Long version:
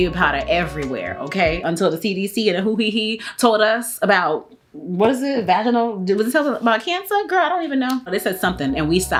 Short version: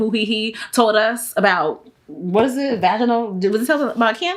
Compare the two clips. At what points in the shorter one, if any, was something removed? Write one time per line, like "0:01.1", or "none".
none